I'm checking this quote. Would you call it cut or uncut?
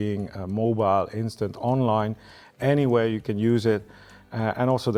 uncut